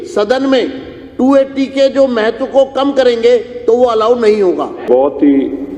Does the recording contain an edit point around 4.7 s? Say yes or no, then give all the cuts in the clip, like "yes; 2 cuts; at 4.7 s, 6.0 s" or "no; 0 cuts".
yes; 1 cut; at 4.7 s